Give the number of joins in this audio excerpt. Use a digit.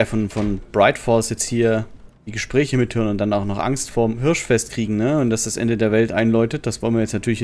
1